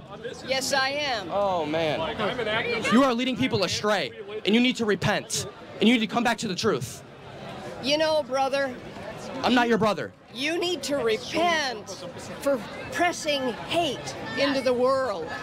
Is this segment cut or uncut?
uncut